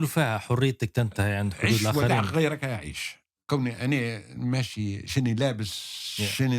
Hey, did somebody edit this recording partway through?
yes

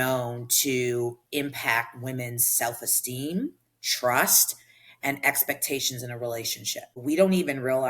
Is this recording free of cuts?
no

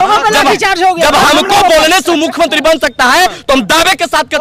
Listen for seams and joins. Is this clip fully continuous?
yes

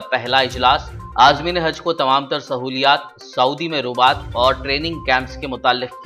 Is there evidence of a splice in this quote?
no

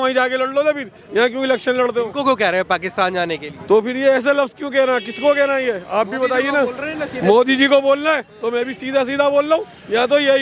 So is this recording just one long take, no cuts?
yes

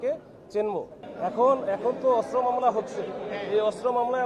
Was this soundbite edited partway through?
yes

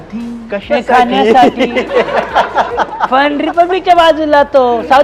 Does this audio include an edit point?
no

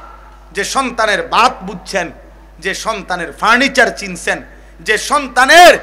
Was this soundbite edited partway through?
no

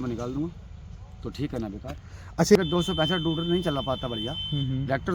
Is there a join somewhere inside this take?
yes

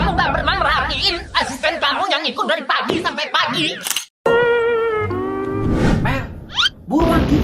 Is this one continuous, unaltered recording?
no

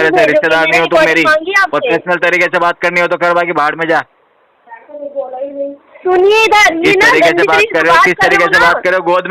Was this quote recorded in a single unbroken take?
yes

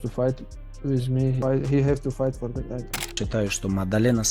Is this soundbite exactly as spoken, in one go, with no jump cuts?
no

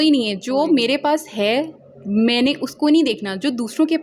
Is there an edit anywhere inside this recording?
no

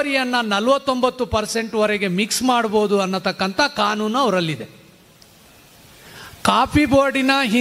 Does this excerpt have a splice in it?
no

